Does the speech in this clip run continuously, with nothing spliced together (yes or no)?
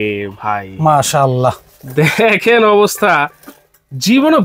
yes